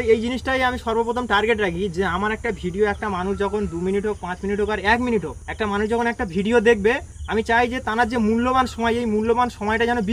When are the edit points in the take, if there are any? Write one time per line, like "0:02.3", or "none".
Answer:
0:05.4
0:07.1